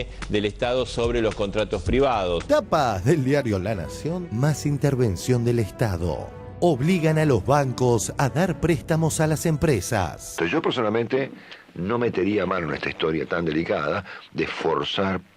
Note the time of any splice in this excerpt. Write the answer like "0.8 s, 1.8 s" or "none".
10.3 s